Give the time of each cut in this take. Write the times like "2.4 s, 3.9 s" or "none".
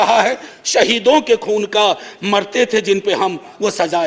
none